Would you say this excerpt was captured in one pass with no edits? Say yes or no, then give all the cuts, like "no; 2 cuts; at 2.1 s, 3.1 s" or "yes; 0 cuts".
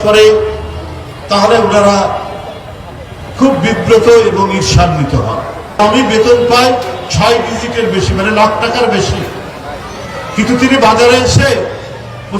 no; 1 cut; at 5.8 s